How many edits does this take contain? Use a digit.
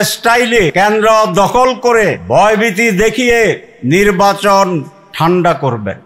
4